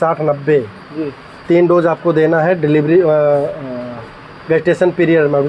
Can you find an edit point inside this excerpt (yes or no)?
no